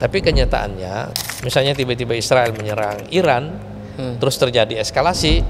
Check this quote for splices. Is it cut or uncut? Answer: cut